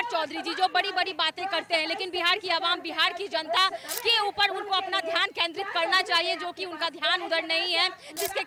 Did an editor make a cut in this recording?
no; 0 cuts

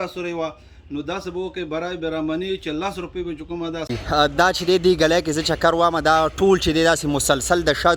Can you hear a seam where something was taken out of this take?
yes; 1 cut; at 4.0 s

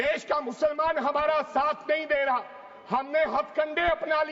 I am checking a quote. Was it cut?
no; 0 cuts

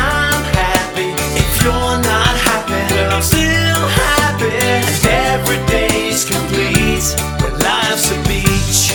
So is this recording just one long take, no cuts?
yes; 0 cuts

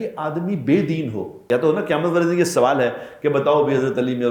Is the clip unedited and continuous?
no; 1 cut; at 1.4 s

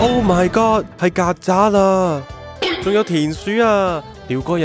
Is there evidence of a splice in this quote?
no; 0 cuts

